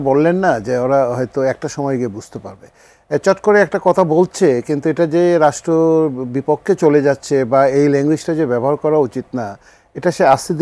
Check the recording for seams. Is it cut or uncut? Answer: uncut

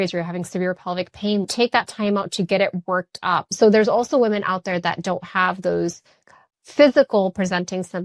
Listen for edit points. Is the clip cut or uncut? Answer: cut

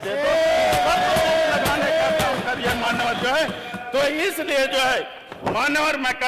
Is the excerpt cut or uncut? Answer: uncut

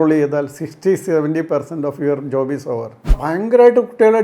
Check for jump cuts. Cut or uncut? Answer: cut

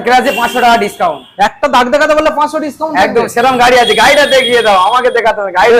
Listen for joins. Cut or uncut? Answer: uncut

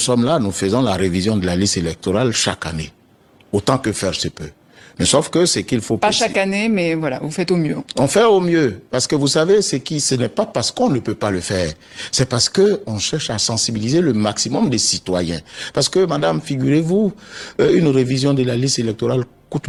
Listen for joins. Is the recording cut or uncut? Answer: uncut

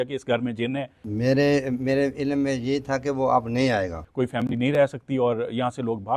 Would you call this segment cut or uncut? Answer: cut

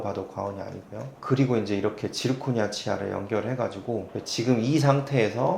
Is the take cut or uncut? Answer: cut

